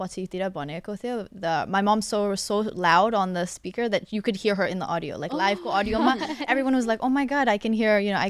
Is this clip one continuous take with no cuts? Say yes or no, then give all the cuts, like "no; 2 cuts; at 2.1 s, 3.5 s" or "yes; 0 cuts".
yes; 0 cuts